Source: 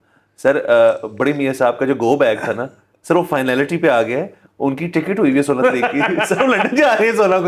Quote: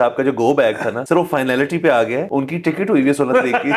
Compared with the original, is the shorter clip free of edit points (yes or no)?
no